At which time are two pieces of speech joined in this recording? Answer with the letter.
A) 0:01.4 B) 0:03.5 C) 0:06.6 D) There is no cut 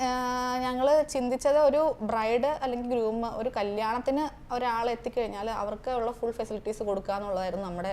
D